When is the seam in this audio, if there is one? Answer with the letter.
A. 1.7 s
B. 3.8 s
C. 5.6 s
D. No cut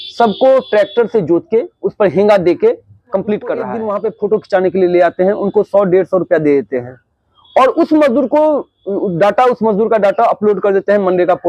B